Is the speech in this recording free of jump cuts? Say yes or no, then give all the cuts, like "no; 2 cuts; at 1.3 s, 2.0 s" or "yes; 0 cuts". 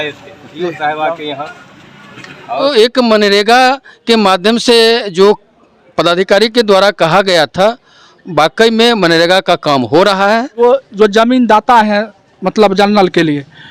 no; 2 cuts; at 2.6 s, 10.6 s